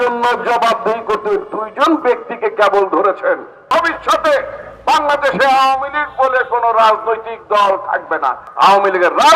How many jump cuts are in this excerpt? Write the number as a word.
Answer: two